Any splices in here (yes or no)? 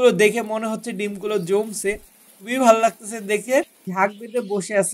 yes